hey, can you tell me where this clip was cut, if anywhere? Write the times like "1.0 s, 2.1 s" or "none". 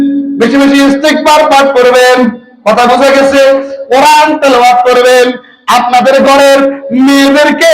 none